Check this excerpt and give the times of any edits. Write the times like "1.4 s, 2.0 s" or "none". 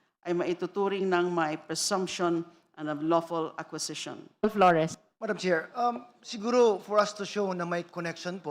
4.4 s